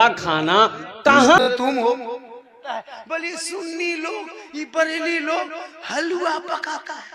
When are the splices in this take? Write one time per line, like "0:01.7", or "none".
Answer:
0:01.4